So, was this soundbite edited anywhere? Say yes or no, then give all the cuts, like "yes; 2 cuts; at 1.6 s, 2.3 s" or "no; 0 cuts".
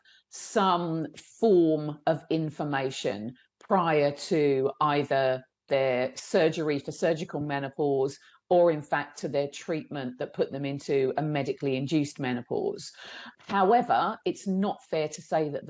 yes; 1 cut; at 13.2 s